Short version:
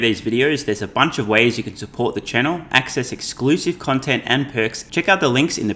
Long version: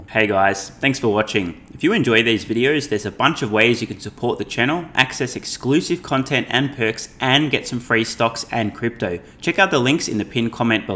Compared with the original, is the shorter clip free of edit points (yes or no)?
no